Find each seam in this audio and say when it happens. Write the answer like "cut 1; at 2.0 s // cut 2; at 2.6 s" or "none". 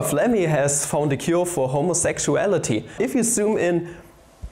cut 1; at 2.9 s

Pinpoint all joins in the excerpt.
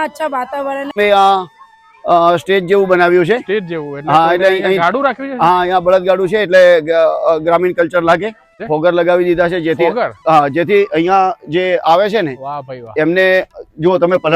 cut 1; at 0.9 s // cut 2; at 8.6 s

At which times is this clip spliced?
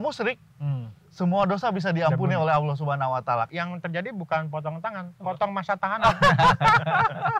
cut 1; at 3.5 s

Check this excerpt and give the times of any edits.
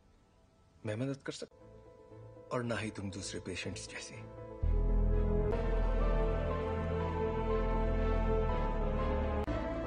cut 1; at 5.5 s

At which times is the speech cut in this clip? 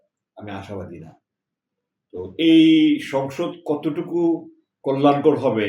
none

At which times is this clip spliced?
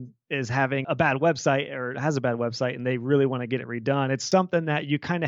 cut 1; at 0.9 s // cut 2; at 4.2 s

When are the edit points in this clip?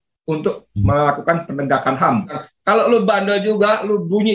cut 1; at 2.5 s

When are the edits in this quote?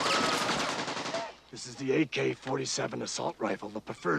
none

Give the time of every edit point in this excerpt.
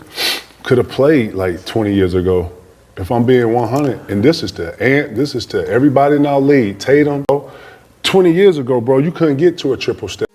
cut 1; at 7.3 s

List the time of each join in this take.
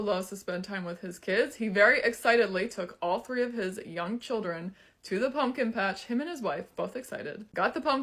cut 1; at 1.1 s

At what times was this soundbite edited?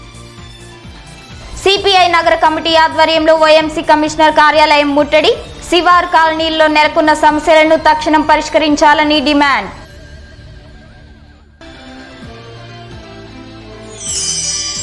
cut 1; at 1.2 s

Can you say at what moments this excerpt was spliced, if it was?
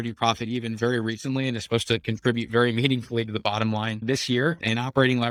none

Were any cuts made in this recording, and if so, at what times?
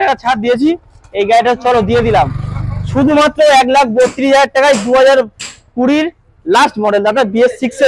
none

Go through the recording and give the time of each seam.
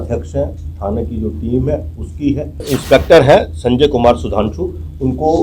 cut 1; at 2.7 s

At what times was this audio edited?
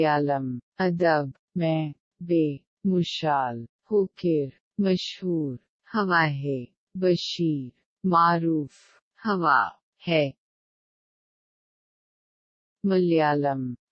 cut 1; at 1.4 s

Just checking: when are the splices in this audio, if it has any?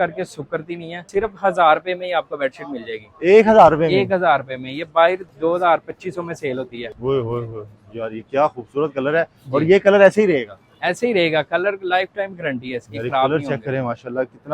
cut 1; at 1.0 s // cut 2; at 5.2 s // cut 3; at 6.8 s

